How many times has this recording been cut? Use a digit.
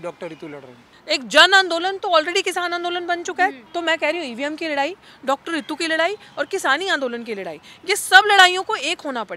2